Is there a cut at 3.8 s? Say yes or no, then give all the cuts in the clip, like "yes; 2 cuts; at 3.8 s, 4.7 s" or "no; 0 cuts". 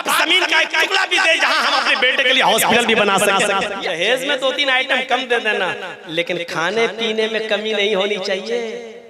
yes; 1 cut; at 3.8 s